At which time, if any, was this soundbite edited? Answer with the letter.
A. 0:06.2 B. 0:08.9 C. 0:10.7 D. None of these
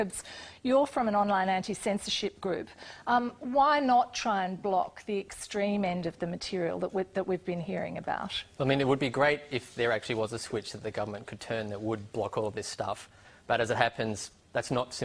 C